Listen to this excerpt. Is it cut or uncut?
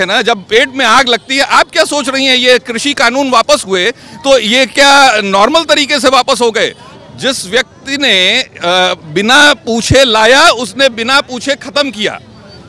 uncut